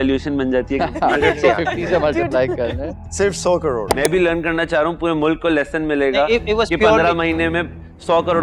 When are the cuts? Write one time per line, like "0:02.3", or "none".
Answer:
0:03.9